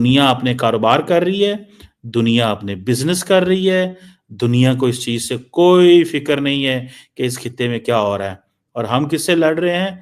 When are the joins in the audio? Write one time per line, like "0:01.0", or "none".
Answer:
none